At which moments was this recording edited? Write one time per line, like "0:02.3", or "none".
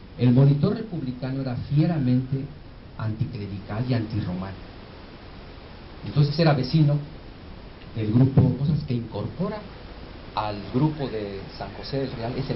none